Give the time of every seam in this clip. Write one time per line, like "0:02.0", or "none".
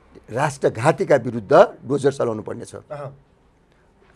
none